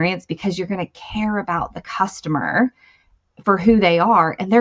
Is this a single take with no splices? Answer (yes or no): yes